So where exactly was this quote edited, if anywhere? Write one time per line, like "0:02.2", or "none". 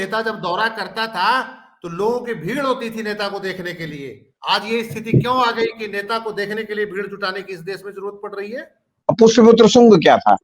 0:09.0